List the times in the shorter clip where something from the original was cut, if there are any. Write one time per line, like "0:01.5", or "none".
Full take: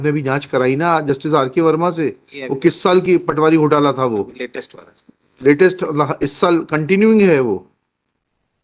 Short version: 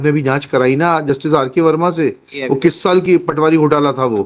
none